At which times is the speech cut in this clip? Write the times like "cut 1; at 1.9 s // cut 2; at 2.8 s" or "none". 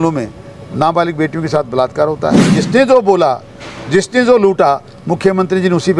cut 1; at 2.6 s